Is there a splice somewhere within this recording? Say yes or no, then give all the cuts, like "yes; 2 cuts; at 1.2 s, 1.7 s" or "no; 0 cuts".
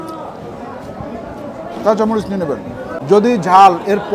yes; 1 cut; at 2.9 s